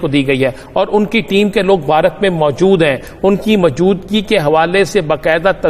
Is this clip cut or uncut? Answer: uncut